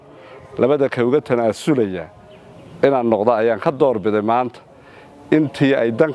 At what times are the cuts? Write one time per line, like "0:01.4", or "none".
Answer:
none